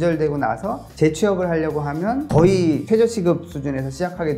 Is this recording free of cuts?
no; 1 cut; at 2.2 s

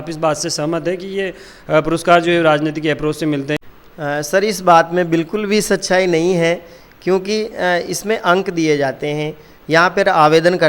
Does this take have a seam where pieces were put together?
no; 0 cuts

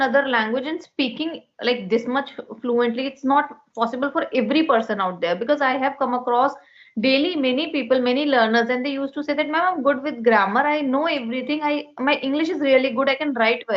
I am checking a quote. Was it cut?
no; 0 cuts

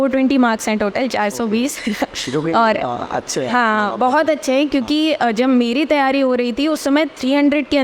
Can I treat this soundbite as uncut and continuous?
yes; 0 cuts

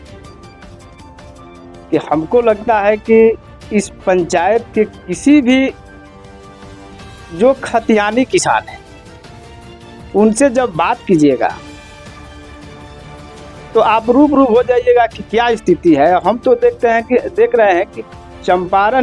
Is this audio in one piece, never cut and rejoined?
no; 2 cuts; at 11.9 s, 13.5 s

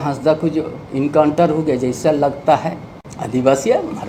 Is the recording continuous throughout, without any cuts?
yes; 0 cuts

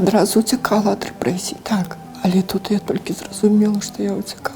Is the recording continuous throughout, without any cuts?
no; 1 cut; at 2.0 s

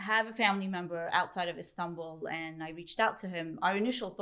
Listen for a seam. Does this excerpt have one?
no; 0 cuts

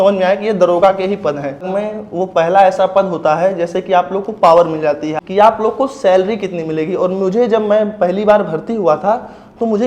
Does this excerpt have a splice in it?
yes; 2 cuts; at 1.7 s, 5.2 s

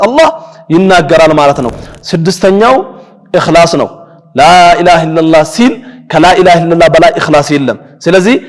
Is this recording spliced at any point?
yes; 1 cut; at 1.7 s

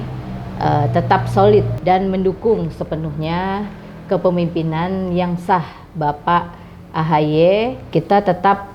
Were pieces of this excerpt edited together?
yes; 2 cuts; at 1.7 s, 7.9 s

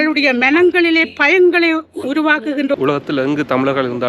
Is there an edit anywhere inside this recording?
yes; 1 cut; at 2.7 s

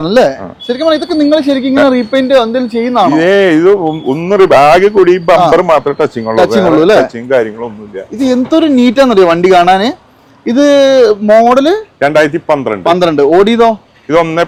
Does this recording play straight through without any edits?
yes; 0 cuts

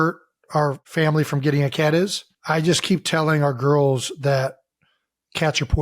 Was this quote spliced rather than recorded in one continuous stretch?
yes; 2 cuts; at 0.8 s, 2.3 s

